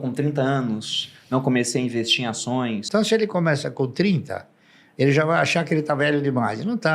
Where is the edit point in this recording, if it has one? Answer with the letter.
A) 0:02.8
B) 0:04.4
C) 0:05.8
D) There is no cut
A